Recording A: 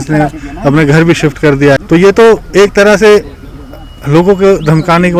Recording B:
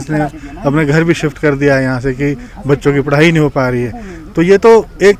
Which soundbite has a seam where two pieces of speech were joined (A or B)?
A